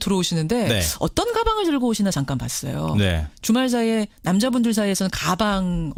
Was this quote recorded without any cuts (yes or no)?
yes